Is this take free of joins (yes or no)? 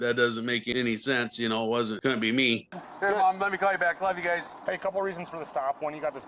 no